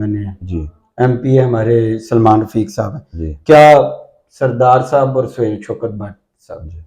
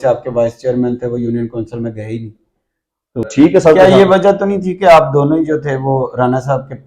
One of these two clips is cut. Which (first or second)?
second